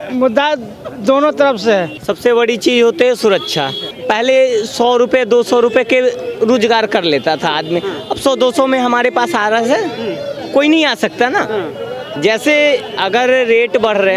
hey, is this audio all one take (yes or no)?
yes